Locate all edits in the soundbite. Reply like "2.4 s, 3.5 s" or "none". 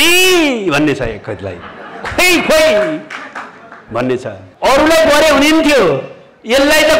4.4 s